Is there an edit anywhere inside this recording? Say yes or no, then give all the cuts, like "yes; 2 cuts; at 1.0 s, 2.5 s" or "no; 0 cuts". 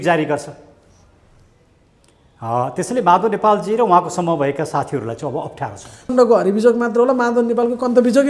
yes; 1 cut; at 6.1 s